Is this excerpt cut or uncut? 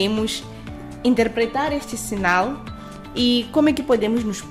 uncut